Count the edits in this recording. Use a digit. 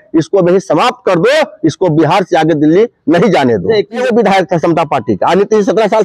1